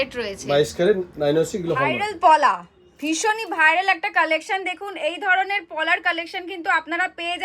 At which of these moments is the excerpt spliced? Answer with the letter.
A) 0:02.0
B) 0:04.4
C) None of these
A